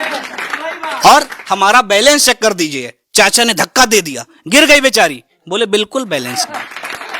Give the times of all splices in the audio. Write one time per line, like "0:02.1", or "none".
0:01.4